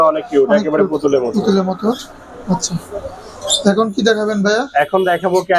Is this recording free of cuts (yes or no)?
yes